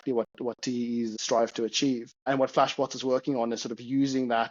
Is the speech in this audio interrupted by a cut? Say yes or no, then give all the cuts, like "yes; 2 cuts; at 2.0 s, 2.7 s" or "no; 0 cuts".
yes; 2 cuts; at 1.1 s, 2.3 s